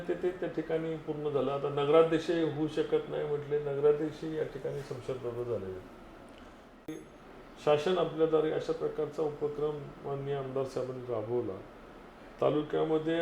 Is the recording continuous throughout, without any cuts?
no; 1 cut; at 7.0 s

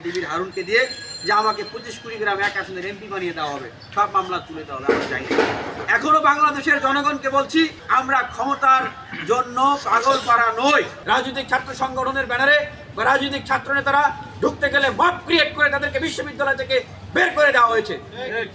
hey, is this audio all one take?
yes; 0 cuts

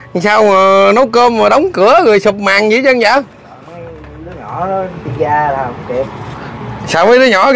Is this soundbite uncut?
yes; 0 cuts

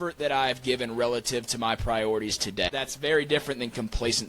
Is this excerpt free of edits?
no; 1 cut; at 2.7 s

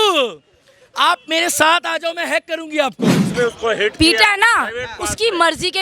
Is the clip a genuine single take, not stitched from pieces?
no; 1 cut; at 3.3 s

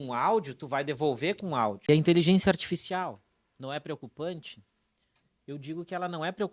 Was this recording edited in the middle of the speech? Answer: yes; 1 cut; at 1.9 s

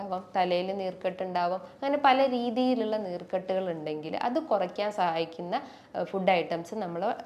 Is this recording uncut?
yes; 0 cuts

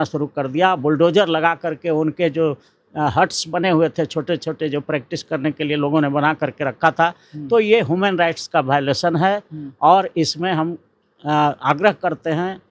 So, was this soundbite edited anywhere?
no; 0 cuts

